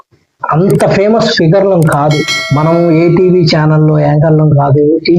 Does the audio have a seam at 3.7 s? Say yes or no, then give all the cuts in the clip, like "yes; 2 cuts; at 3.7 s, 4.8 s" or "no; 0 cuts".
no; 1 cut; at 2.3 s